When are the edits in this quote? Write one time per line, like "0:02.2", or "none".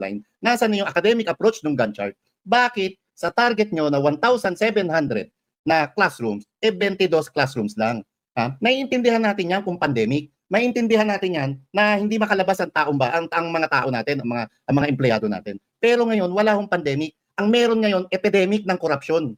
none

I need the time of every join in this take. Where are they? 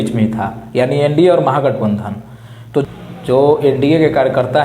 0:02.8

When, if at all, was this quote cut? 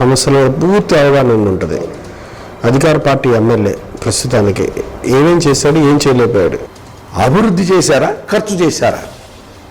0:06.7

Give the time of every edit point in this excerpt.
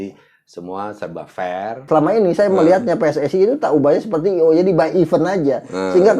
0:01.8

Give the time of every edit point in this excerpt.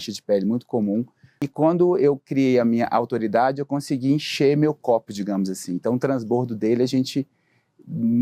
0:01.5

